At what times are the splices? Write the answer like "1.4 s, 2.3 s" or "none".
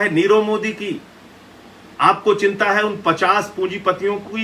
none